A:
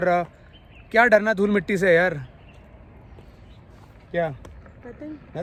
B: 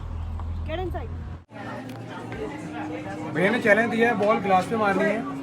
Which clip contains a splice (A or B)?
B